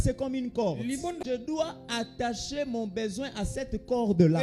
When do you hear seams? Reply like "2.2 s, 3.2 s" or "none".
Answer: 1.4 s